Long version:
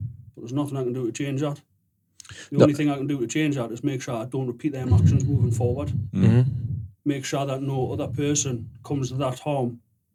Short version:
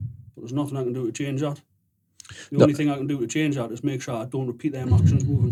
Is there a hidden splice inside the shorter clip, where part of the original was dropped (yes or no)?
no